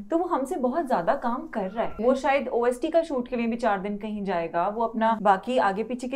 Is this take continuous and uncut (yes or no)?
no